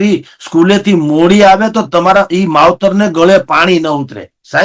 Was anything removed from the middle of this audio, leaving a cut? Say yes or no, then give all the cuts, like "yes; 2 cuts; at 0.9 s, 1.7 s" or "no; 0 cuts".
no; 0 cuts